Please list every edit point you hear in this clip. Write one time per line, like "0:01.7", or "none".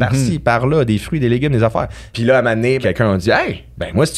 0:02.0
0:02.8